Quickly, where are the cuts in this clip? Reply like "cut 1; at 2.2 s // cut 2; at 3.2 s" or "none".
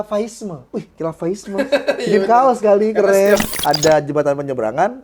cut 1; at 3.5 s